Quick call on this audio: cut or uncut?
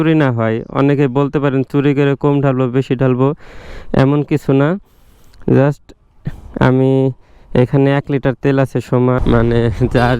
cut